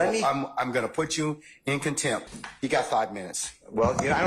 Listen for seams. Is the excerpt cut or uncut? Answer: cut